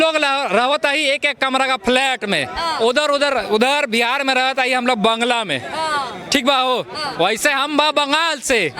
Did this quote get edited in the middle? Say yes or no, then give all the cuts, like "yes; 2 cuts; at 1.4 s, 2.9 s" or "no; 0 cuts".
no; 0 cuts